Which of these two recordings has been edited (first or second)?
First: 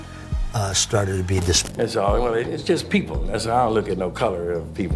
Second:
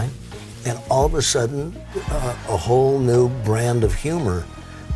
first